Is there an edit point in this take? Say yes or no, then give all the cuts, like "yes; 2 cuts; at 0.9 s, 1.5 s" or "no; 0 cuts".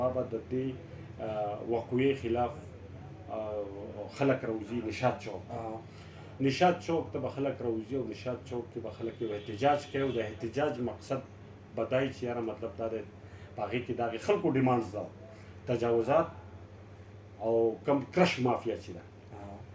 no; 0 cuts